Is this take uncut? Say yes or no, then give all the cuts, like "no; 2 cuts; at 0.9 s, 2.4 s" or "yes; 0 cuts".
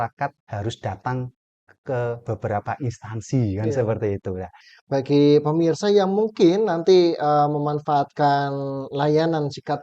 no; 1 cut; at 4.7 s